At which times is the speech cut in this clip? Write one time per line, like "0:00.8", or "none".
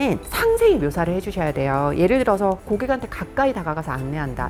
none